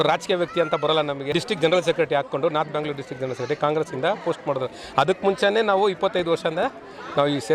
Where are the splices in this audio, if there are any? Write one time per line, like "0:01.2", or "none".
0:01.2